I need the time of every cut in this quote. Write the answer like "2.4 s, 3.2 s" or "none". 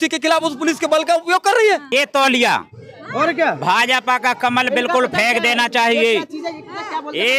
1.9 s